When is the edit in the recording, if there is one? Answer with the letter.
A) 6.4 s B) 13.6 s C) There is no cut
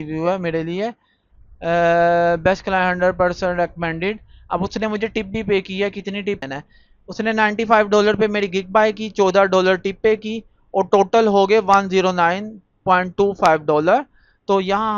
A